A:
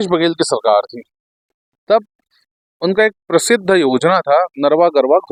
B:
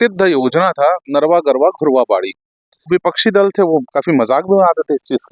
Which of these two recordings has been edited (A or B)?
B